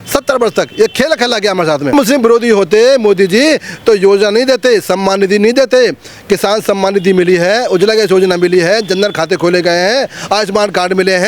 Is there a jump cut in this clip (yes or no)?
yes